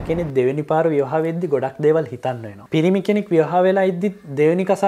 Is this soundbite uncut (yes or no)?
no